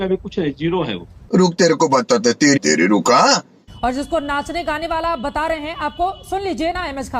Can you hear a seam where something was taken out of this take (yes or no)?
yes